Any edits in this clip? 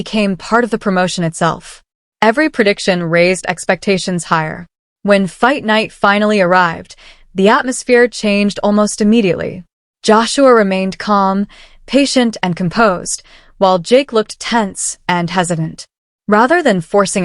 yes; 1 cut; at 1.6 s

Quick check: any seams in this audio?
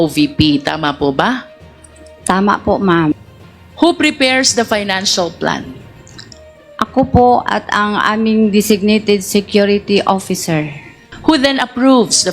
no; 0 cuts

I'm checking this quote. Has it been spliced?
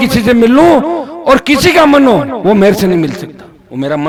no; 0 cuts

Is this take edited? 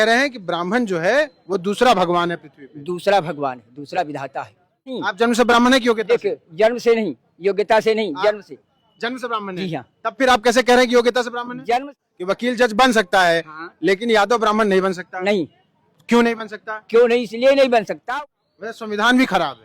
yes; 3 cuts; at 5.1 s, 11.9 s, 18.0 s

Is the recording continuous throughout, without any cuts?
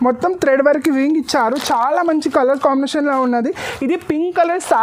yes; 0 cuts

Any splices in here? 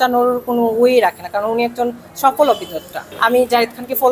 yes; 1 cut; at 3.0 s

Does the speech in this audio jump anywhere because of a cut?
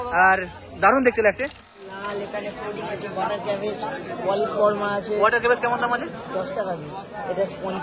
yes; 1 cut; at 1.7 s

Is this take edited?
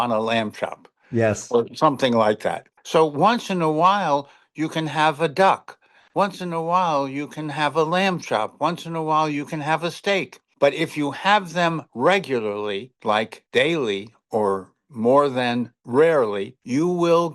yes; 1 cut; at 2.7 s

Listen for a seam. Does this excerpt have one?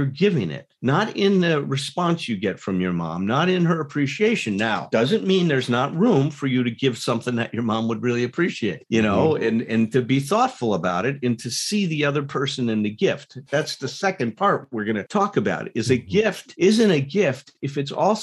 no; 0 cuts

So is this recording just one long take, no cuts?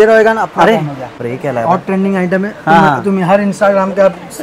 no; 1 cut; at 1.2 s

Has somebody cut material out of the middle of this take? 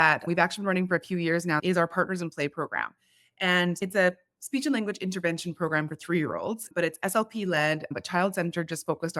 yes; 1 cut; at 1.6 s

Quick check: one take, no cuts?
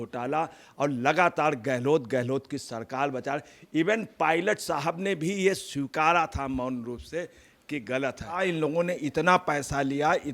no; 1 cut; at 8.4 s

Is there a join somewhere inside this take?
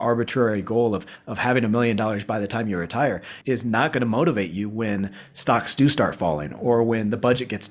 no; 0 cuts

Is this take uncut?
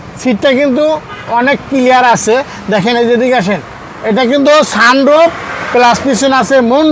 yes; 0 cuts

